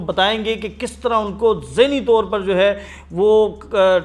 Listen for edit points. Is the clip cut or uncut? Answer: uncut